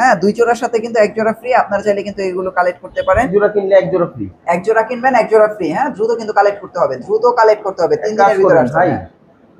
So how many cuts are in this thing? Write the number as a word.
one